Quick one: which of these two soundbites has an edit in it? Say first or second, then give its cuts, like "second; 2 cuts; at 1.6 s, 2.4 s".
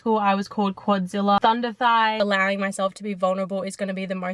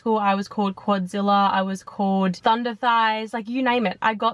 first; 2 cuts; at 1.4 s, 2.2 s